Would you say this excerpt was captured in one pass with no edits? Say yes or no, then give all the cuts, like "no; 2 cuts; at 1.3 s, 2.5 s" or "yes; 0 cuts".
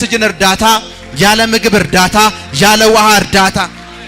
yes; 0 cuts